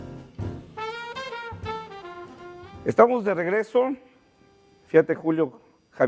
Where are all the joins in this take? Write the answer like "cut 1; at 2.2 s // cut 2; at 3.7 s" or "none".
cut 1; at 2.3 s